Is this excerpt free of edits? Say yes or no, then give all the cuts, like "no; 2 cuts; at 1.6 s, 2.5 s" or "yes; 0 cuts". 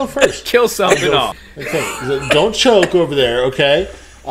no; 1 cut; at 1.3 s